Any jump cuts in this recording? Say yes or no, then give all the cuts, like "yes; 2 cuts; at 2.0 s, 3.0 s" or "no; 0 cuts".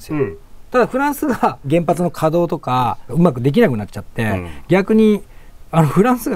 yes; 2 cuts; at 1.6 s, 3.1 s